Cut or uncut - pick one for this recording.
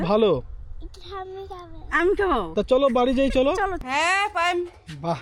cut